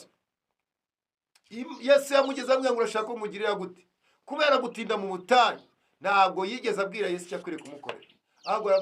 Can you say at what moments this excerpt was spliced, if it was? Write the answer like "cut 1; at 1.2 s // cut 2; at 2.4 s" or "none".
none